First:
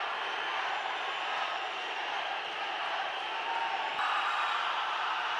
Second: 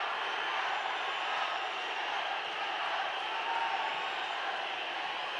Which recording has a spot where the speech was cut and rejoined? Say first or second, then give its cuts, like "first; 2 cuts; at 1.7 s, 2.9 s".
first; 1 cut; at 4.0 s